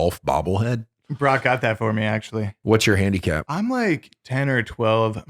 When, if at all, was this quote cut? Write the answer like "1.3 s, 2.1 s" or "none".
2.5 s, 3.5 s